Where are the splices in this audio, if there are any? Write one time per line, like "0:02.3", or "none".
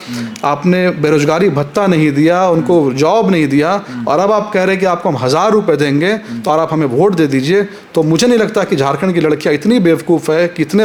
none